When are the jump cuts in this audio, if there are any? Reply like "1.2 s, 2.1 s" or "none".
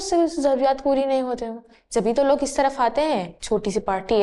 3.3 s